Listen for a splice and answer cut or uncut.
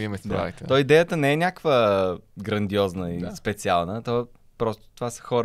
uncut